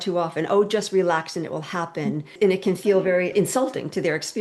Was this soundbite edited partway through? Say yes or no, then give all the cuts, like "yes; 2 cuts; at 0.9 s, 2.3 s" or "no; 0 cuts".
yes; 2 cuts; at 2.3 s, 3.3 s